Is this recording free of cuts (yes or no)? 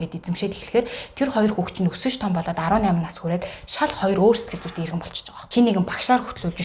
no